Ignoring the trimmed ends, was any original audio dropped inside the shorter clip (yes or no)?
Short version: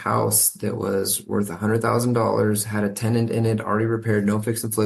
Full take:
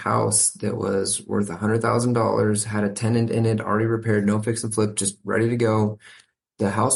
no